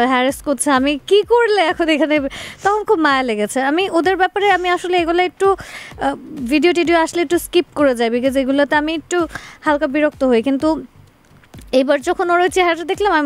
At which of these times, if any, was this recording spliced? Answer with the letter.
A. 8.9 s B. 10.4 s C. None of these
C